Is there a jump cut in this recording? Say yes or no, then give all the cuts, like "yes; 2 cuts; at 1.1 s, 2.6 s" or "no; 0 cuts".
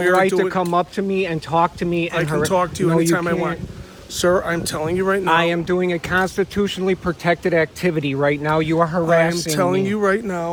no; 0 cuts